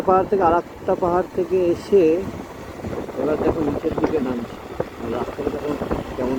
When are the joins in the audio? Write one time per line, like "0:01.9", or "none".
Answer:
none